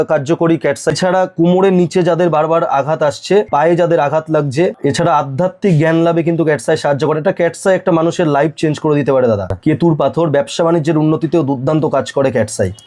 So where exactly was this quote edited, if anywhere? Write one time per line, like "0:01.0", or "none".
0:00.9
0:03.5
0:04.8
0:09.5